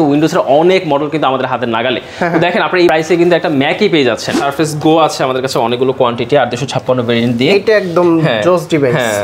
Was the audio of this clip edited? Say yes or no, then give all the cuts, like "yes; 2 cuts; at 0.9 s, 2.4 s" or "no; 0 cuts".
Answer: yes; 1 cut; at 4.3 s